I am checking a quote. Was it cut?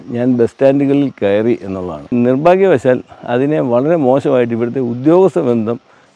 yes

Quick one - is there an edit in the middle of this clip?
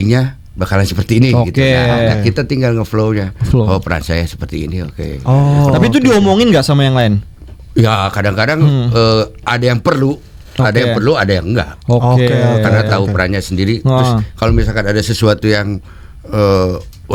no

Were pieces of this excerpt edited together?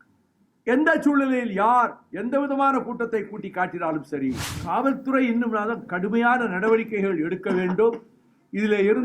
yes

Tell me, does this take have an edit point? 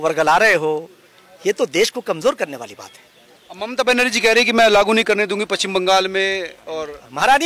no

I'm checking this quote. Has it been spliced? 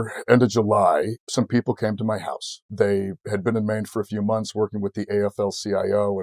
yes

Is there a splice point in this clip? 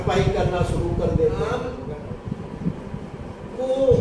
yes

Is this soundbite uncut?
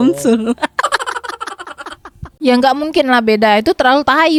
yes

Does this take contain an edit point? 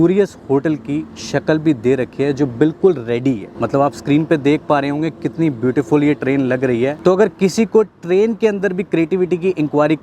no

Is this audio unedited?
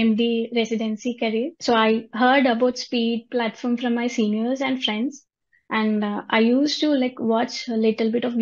no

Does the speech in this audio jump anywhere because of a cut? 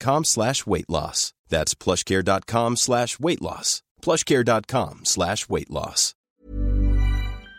yes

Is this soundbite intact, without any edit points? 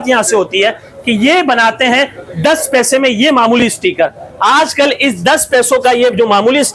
yes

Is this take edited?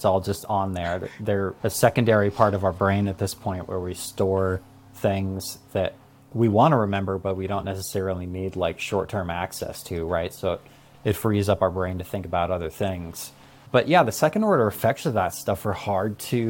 no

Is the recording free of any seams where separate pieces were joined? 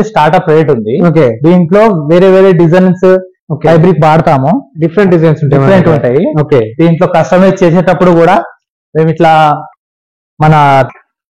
yes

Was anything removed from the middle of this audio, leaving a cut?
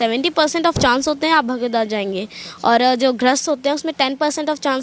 no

